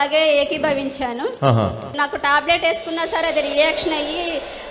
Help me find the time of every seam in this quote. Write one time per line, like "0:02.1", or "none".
0:01.9